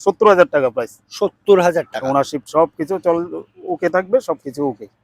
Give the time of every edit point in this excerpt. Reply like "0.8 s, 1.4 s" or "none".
none